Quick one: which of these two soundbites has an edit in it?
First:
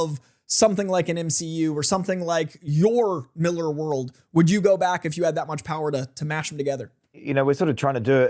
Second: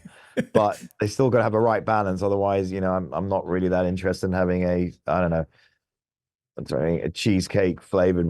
first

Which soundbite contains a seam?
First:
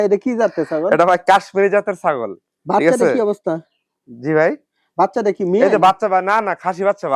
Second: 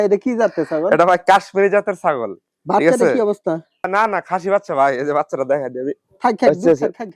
second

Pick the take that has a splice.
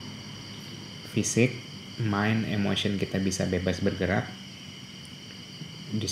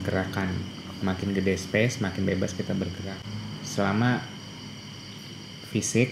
second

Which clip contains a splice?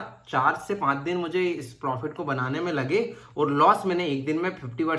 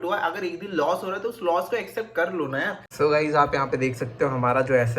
second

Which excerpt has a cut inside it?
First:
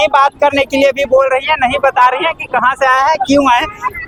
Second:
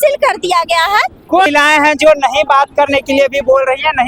second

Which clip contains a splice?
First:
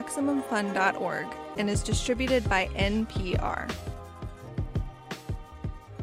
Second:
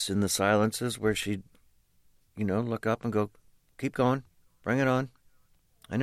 second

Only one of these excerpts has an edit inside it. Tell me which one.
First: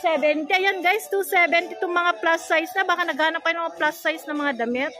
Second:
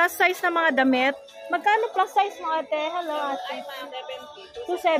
second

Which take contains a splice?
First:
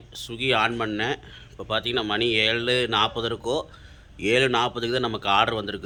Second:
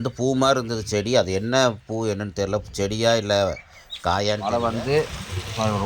second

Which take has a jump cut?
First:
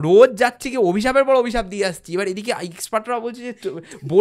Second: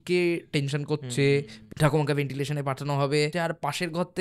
second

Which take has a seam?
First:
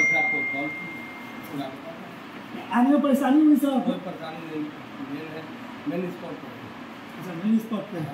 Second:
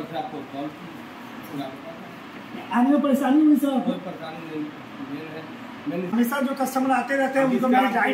second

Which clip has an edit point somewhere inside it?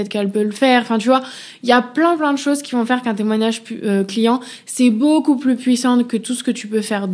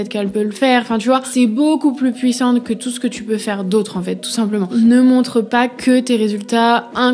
second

